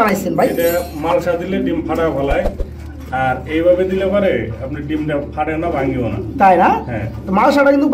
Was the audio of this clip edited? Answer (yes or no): no